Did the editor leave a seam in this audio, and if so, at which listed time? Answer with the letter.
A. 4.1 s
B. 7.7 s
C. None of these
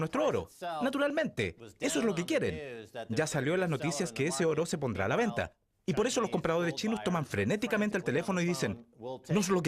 B